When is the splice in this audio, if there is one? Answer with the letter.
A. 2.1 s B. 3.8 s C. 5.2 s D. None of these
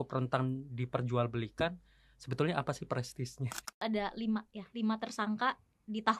B